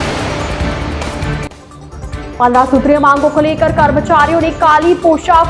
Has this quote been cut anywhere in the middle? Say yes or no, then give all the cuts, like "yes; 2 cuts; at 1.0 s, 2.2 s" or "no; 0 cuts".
yes; 1 cut; at 2.3 s